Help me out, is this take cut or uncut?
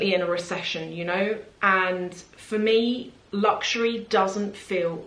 uncut